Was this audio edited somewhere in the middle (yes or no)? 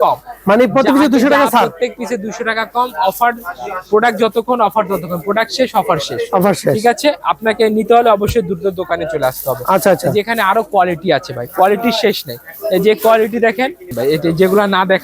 no